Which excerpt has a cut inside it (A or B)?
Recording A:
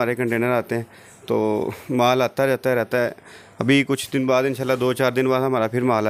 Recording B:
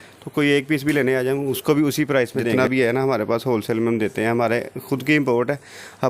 B